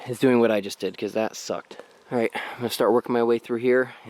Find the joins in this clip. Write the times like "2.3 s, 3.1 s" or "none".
none